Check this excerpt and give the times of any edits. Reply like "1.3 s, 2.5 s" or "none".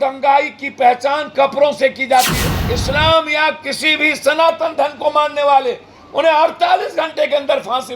2.5 s